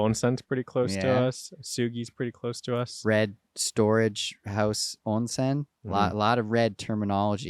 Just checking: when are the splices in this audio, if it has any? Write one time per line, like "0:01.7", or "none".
none

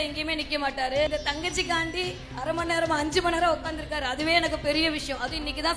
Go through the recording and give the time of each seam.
0:01.1
0:02.2

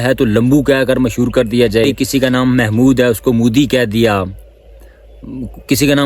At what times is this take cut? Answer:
0:01.9

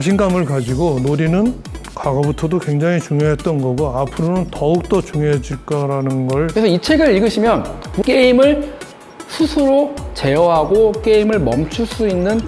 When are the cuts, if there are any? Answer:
0:06.5
0:07.9

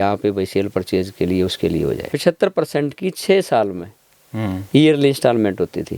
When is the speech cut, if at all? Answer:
0:02.1

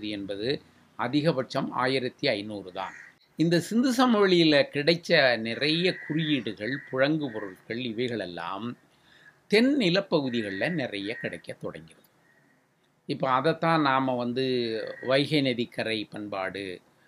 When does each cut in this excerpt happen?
0:03.0

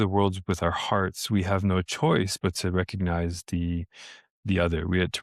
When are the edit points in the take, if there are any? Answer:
none

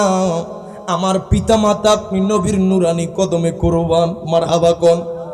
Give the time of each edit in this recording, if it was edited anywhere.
none

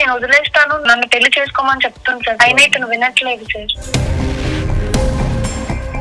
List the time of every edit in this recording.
0:00.8
0:02.4

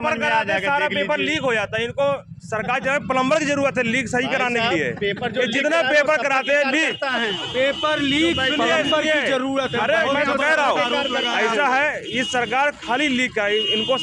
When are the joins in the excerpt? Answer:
none

